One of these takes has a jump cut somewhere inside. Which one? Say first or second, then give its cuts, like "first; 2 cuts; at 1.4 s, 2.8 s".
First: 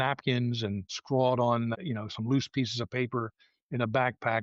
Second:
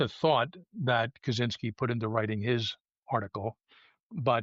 first; 2 cuts; at 1.0 s, 1.7 s